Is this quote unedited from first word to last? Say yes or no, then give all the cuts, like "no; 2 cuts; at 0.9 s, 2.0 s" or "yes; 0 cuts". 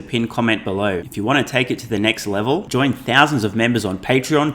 no; 1 cut; at 1.1 s